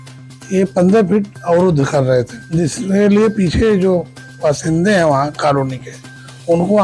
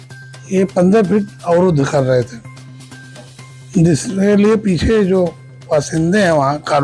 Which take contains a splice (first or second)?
first